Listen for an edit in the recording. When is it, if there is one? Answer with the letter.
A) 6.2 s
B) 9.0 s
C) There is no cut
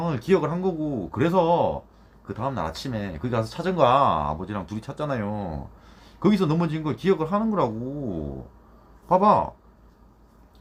C